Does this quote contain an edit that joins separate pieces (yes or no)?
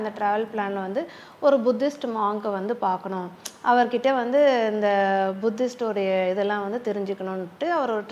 no